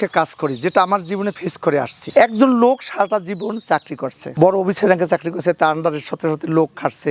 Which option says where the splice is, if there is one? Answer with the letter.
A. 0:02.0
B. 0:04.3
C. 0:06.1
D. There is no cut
A